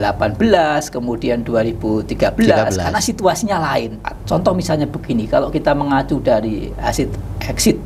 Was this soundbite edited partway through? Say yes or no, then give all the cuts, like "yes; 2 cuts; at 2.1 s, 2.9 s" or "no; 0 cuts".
yes; 1 cut; at 4.1 s